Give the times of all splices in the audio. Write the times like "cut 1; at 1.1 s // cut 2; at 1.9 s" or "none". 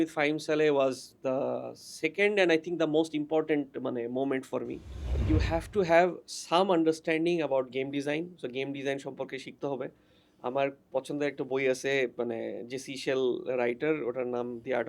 cut 1; at 5.2 s